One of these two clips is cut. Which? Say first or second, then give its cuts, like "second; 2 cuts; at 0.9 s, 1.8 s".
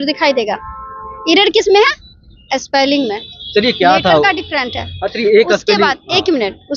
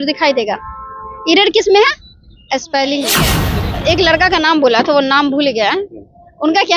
second; 1 cut; at 3.4 s